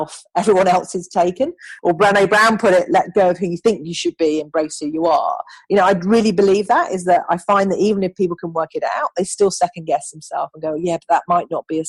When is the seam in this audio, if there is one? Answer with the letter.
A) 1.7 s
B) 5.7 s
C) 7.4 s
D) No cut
A